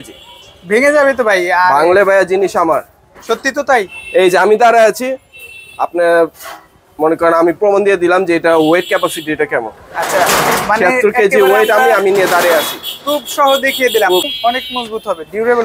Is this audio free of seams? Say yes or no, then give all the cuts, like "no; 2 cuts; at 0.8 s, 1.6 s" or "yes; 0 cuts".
yes; 0 cuts